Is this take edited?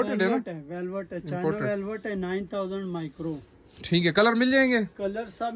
no; 0 cuts

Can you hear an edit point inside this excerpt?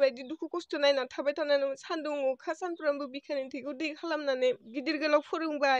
yes; 1 cut; at 4.7 s

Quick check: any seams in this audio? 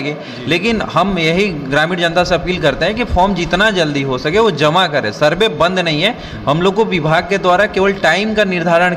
no; 0 cuts

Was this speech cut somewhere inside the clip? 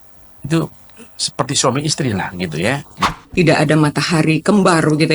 yes; 1 cut; at 3.0 s

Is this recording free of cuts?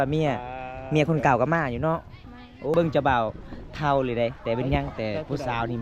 no; 1 cut; at 2.7 s

